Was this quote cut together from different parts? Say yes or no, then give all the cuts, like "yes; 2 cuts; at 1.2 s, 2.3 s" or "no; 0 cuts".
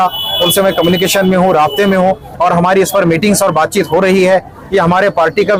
no; 0 cuts